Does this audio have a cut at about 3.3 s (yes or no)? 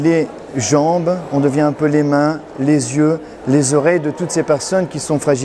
no